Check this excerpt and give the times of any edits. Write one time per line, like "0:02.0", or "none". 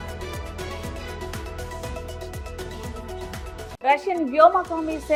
none